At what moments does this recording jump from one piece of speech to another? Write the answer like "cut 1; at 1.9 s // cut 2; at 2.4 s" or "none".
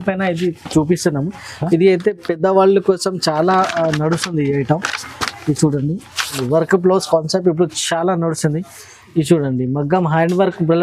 cut 1; at 6.4 s